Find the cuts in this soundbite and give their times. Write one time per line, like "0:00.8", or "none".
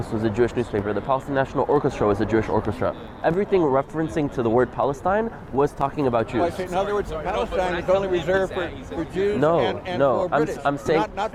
none